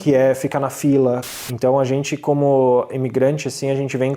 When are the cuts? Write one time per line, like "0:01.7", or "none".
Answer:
0:01.3